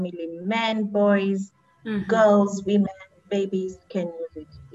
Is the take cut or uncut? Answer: uncut